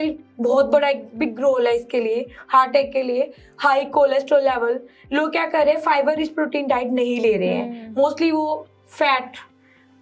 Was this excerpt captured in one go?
yes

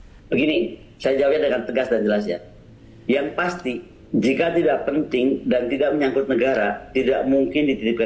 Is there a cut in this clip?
no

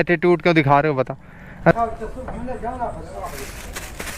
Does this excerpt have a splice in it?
yes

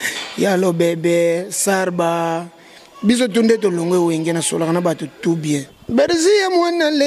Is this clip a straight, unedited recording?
no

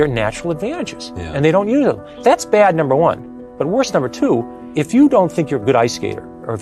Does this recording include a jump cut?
yes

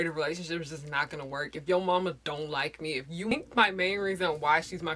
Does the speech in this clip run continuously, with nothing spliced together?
no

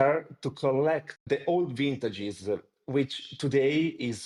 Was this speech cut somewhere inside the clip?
no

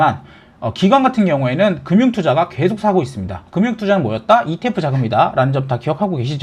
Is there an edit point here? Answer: no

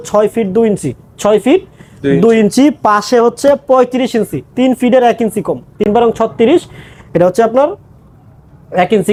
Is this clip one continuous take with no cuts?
yes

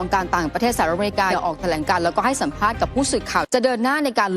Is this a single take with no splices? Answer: no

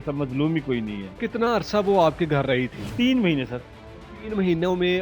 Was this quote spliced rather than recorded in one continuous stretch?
yes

